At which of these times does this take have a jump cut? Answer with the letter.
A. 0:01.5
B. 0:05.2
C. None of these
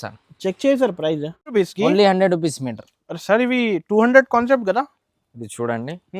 A